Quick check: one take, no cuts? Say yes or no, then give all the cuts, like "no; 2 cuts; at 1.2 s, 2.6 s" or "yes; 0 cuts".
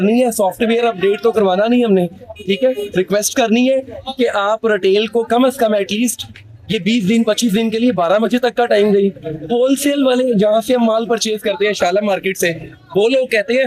yes; 0 cuts